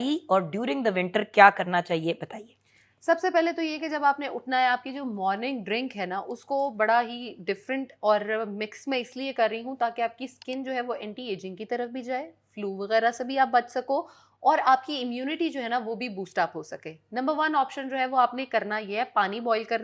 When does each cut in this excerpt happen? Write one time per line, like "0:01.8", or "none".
none